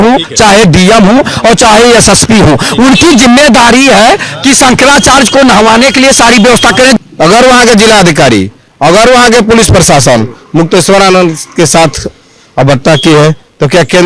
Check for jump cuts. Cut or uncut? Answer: cut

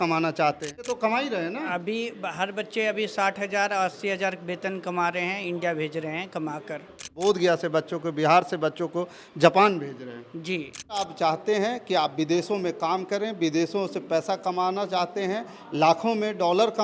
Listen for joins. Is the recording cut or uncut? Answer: cut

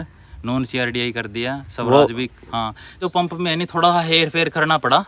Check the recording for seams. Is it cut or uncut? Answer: cut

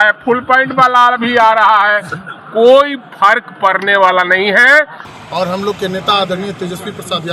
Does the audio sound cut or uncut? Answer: cut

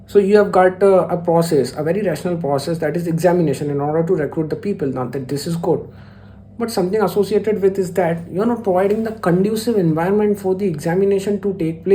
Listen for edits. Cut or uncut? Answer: uncut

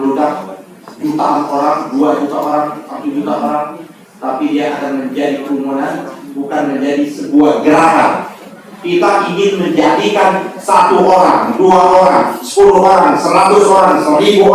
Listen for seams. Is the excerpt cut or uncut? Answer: uncut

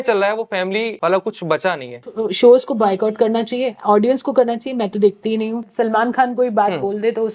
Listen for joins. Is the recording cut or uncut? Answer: cut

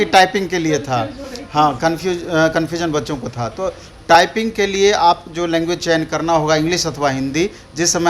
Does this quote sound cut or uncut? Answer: uncut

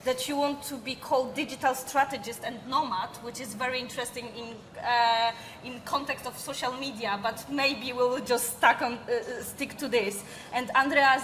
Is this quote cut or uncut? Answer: cut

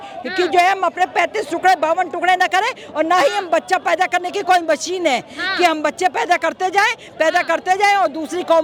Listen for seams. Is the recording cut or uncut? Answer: uncut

